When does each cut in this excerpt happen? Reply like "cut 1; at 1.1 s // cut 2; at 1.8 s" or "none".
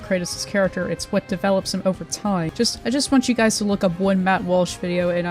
cut 1; at 2.5 s